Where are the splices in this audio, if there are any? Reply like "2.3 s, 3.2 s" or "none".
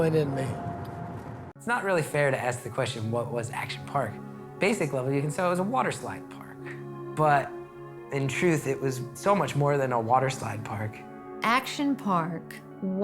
1.6 s